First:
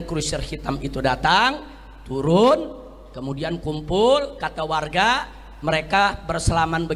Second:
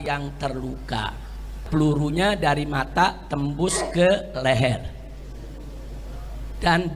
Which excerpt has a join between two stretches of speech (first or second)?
second